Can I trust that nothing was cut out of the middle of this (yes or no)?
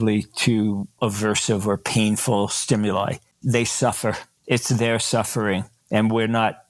no